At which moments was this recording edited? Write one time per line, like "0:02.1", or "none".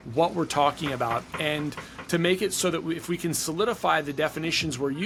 none